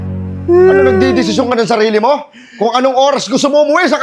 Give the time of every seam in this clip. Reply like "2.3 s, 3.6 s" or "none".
none